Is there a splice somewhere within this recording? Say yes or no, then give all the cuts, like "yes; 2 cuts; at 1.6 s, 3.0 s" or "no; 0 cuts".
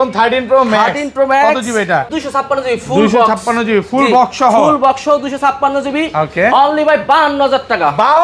yes; 1 cut; at 2.2 s